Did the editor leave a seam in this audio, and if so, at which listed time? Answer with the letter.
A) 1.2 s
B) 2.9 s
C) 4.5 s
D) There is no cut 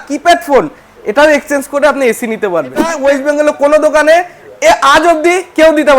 B